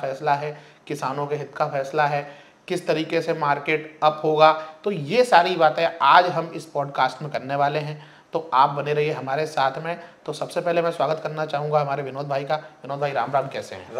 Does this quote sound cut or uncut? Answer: uncut